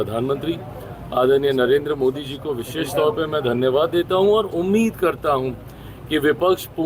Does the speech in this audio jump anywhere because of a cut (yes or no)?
no